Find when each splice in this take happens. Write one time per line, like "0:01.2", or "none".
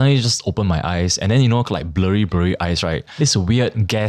0:03.1

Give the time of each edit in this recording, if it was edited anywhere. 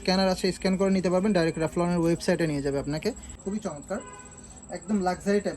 0:03.3

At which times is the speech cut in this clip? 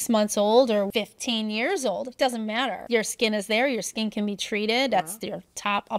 0:00.9
0:02.8

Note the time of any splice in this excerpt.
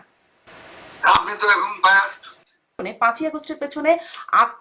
0:02.8

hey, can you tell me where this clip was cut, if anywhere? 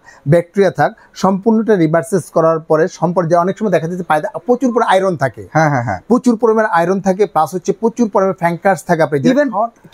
none

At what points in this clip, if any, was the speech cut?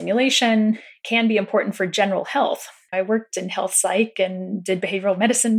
0:02.8

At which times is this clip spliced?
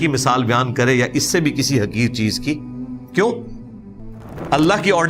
none

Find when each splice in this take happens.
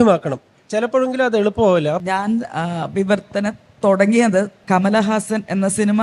0:02.1
0:04.6

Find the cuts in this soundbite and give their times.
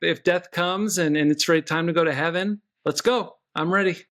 none

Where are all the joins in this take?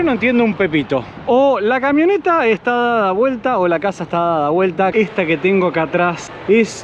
0:04.9

